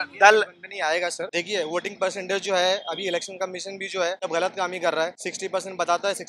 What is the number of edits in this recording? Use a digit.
3